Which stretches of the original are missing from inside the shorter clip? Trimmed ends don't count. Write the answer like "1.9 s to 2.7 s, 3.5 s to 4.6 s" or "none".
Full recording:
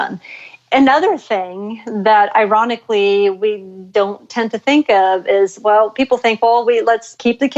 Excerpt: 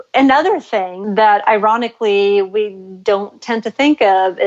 1.5 s to 1.8 s